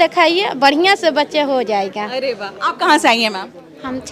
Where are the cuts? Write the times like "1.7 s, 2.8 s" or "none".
none